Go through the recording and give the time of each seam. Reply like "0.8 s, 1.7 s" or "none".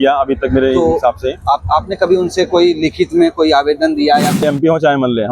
4.4 s